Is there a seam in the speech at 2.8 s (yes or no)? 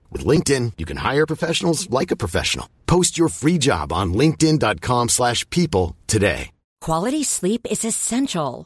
no